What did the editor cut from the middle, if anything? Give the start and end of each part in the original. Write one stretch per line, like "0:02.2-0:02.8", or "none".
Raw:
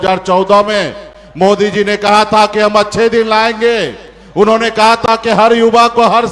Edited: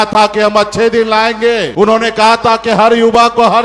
0:03.9-0:04.3